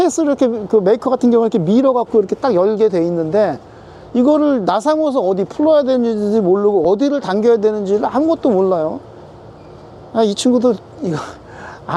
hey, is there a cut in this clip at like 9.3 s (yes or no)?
no